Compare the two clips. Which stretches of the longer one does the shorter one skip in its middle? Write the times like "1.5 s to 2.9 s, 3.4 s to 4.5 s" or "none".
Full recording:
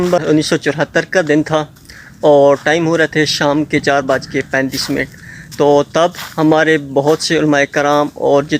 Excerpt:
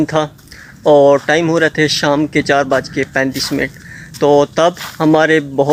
none